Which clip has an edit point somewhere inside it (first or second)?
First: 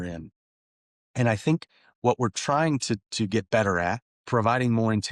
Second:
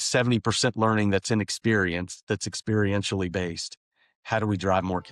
first